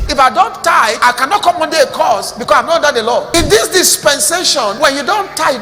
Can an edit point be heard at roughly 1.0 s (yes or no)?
yes